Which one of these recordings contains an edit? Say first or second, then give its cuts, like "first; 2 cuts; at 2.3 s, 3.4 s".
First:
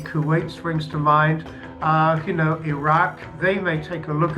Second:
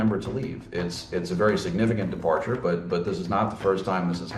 first; 1 cut; at 3.3 s